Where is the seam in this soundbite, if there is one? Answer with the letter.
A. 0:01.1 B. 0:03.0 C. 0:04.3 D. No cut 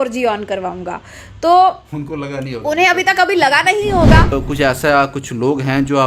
C